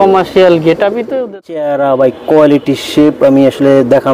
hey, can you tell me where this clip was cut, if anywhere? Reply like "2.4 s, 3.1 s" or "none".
1.1 s

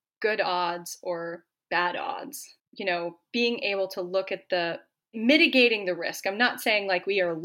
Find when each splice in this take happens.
2.6 s

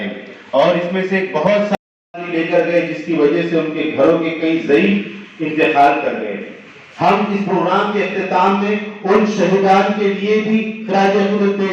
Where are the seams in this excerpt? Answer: 1.7 s

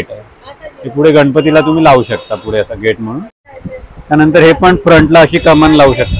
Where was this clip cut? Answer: 3.4 s

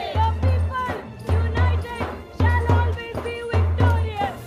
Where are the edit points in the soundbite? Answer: none

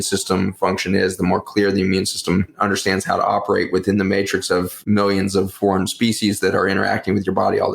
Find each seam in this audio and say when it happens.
4.8 s, 5.5 s

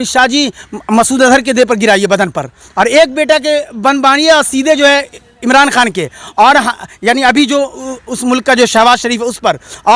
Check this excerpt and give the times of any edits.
none

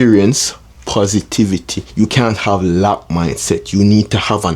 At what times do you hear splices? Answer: 1.8 s

